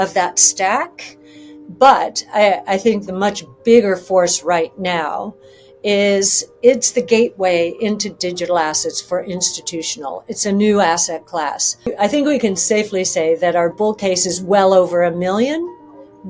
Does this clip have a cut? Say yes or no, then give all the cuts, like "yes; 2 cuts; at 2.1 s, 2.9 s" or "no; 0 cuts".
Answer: yes; 1 cut; at 11.9 s